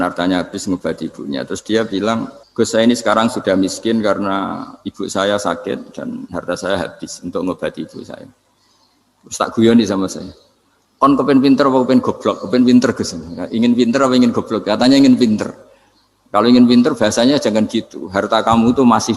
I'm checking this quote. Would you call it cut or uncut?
cut